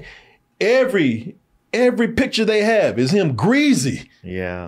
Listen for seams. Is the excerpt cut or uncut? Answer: uncut